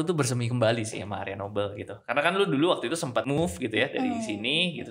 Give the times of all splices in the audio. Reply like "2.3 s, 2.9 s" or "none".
3.4 s